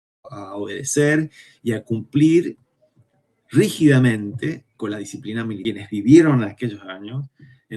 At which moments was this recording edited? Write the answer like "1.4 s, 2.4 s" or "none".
5.6 s